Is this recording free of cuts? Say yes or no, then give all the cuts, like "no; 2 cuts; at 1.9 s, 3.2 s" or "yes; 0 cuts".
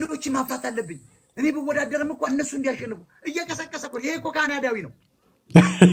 yes; 0 cuts